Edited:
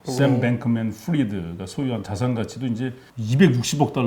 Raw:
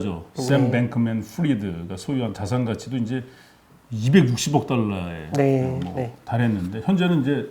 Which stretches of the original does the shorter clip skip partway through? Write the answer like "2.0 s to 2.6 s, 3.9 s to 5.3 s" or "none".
3.4 s to 3.8 s

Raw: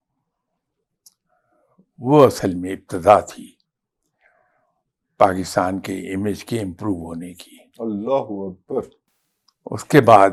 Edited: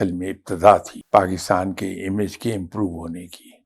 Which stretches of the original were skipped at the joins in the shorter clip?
3.4 s to 5.0 s

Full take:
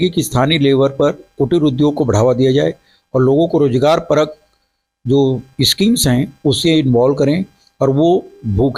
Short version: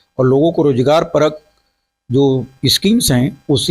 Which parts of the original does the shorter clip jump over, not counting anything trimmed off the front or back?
none

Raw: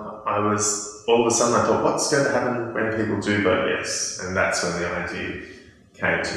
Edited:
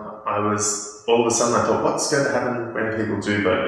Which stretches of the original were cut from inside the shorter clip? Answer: none

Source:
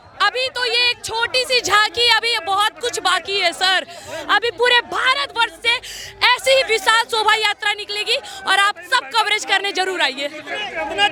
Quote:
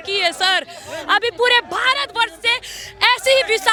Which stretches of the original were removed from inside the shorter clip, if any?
none

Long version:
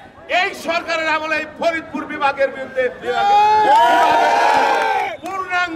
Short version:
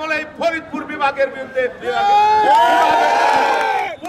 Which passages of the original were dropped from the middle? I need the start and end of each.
none

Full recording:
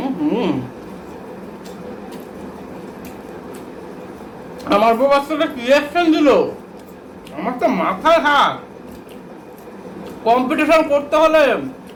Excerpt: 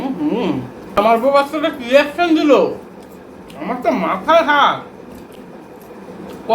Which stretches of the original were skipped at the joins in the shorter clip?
1.0 s to 4.7 s

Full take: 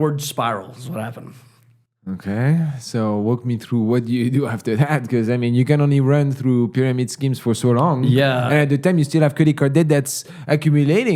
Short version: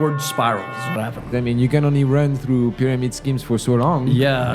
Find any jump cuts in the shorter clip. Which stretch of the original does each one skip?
1.3 s to 5.3 s

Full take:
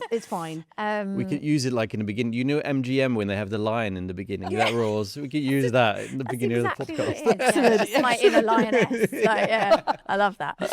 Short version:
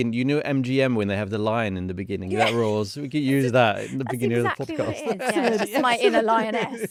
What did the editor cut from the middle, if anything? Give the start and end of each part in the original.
none

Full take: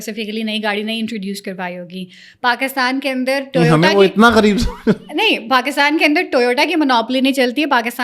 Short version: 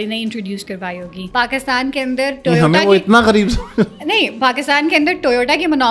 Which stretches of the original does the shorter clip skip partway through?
1.9 s to 2.2 s

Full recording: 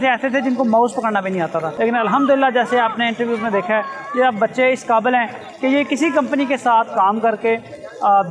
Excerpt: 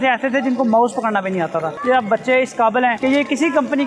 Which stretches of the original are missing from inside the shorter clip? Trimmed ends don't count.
1.7 s to 4.0 s, 5.3 s to 5.6 s

